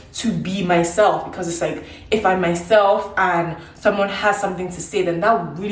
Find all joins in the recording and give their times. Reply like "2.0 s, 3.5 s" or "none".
none